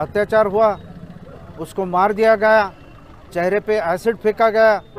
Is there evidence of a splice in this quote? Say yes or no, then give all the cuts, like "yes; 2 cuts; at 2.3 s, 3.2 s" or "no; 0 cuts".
no; 0 cuts